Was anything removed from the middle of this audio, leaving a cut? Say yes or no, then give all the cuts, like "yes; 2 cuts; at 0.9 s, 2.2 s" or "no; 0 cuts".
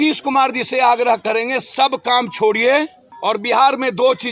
yes; 1 cut; at 3.0 s